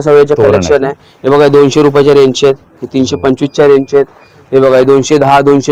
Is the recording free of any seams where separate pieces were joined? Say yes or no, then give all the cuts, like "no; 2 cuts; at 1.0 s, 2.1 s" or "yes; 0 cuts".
yes; 0 cuts